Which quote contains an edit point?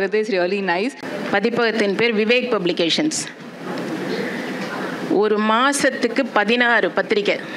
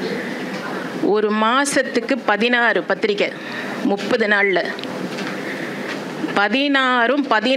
first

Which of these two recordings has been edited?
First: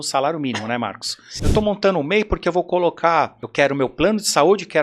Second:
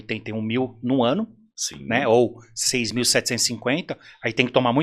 first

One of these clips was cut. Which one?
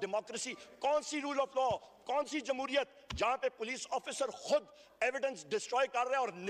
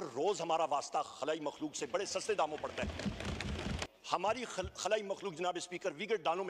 second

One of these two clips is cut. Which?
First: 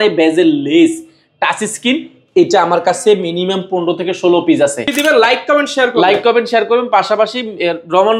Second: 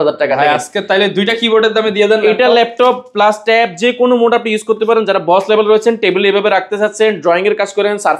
first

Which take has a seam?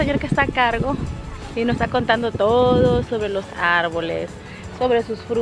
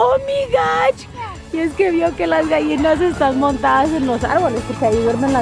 second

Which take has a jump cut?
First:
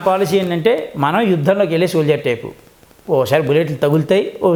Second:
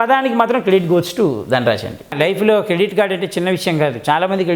second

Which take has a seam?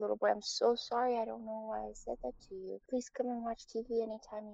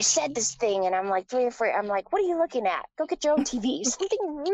first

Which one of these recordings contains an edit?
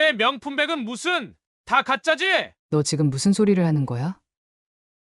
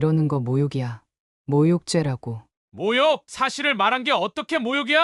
first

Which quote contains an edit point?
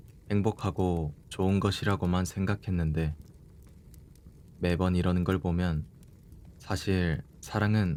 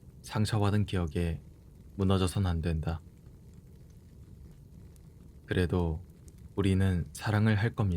second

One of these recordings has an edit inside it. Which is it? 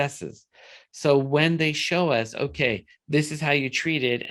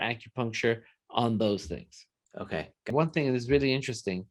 second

